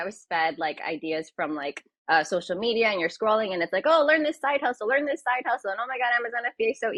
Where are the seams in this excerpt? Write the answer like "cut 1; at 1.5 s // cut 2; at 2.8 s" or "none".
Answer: none